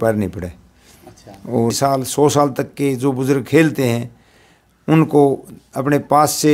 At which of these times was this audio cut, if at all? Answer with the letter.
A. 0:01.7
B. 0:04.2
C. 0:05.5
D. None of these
A